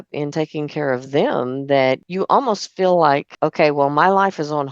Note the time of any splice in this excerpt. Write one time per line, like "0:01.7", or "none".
0:02.1
0:03.3